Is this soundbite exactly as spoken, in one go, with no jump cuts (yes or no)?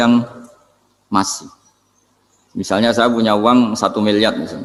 yes